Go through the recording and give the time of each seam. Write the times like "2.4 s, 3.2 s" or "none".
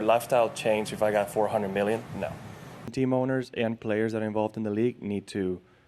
2.8 s